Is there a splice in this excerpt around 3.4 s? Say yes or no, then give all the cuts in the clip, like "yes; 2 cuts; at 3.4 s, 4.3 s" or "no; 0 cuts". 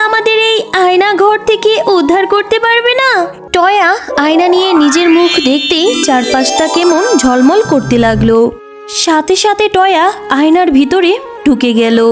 yes; 1 cut; at 3.4 s